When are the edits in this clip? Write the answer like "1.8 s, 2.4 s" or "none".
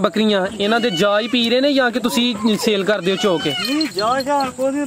none